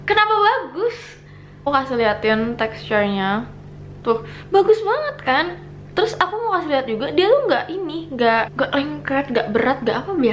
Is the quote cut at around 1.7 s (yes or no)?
yes